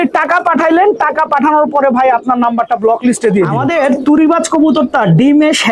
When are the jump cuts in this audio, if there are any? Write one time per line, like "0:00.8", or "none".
0:03.6